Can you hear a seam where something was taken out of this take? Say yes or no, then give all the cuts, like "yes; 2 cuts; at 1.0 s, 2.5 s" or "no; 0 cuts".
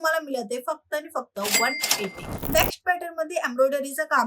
yes; 1 cut; at 2.3 s